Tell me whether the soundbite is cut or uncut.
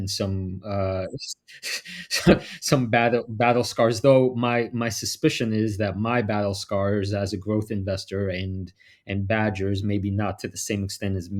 uncut